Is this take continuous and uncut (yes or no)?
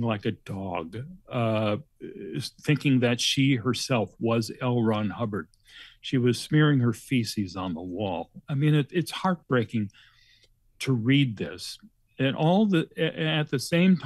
yes